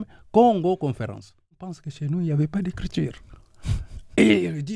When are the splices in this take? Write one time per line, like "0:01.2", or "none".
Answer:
0:01.9